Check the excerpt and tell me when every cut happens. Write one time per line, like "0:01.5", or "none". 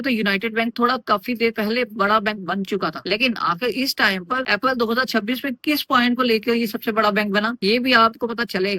none